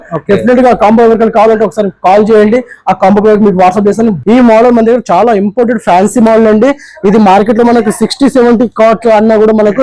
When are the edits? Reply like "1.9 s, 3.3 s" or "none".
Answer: 4.2 s